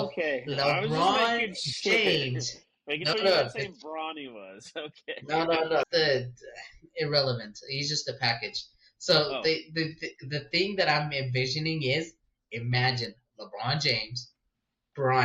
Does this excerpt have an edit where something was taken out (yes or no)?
yes